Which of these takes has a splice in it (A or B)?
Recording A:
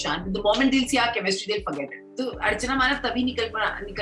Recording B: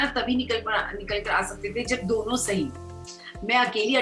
A